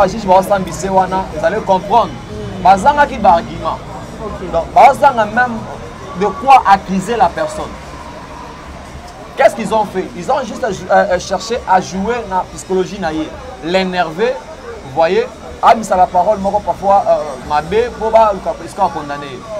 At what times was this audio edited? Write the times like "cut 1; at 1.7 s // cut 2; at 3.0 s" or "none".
none